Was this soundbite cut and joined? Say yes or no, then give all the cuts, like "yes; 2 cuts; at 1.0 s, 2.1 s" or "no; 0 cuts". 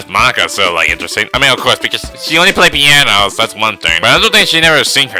yes; 1 cut; at 3.9 s